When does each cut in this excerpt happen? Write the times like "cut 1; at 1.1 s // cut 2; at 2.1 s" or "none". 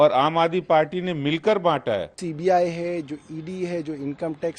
cut 1; at 2.1 s